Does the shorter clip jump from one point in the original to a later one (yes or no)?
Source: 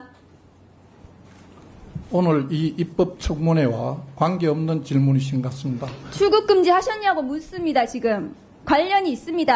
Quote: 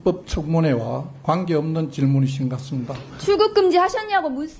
no